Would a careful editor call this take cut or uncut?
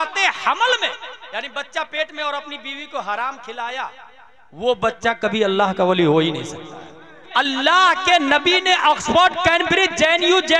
cut